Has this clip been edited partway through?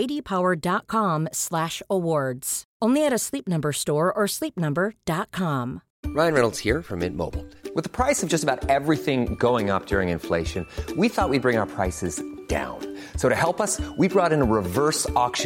yes; 1 cut; at 5.9 s

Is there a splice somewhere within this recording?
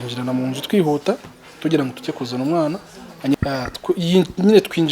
yes; 1 cut; at 3.3 s

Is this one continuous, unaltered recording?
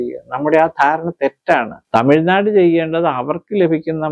no; 1 cut; at 1.7 s

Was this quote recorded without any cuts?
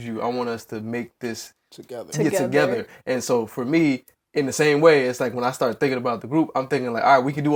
yes; 0 cuts

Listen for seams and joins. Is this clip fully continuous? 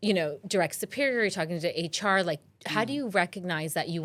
yes; 0 cuts

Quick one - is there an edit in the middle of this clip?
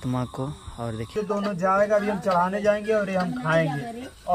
yes; 1 cut; at 1.1 s

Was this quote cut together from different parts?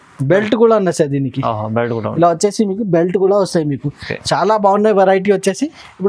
no; 0 cuts

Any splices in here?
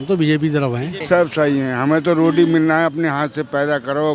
yes; 1 cut; at 1.0 s

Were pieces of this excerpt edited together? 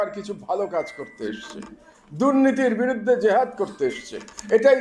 no; 0 cuts

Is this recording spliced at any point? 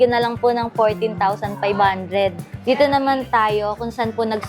yes; 1 cut; at 2.5 s

